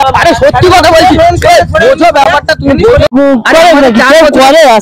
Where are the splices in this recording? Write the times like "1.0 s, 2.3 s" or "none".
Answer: 3.1 s

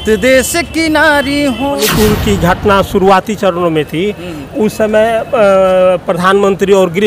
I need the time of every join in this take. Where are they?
1.8 s

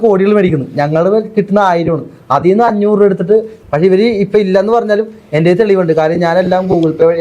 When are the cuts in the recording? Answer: 3.5 s

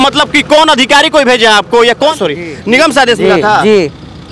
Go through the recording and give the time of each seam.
2.1 s

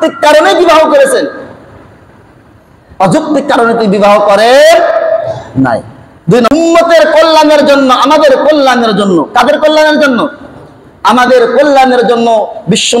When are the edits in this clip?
6.5 s

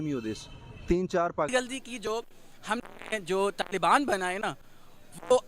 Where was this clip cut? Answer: 1.5 s

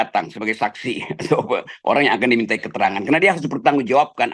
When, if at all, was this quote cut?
none

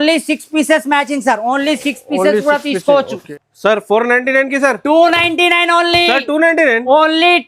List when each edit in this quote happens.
3.2 s

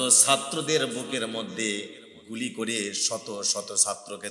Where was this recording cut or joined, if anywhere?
none

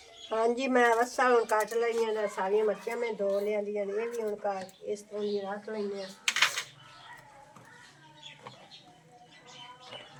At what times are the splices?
none

